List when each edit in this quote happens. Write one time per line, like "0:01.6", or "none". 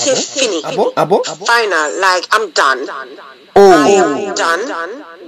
0:01.3

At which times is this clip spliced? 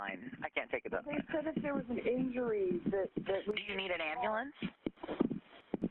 0:02.8

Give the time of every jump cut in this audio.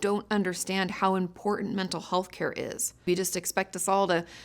0:03.1

